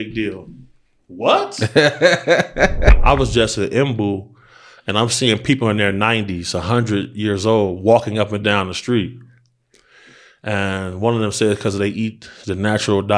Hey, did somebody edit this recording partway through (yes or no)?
yes